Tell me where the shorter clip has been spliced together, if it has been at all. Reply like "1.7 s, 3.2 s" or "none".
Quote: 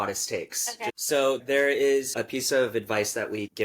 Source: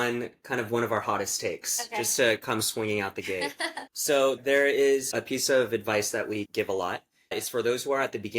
1.0 s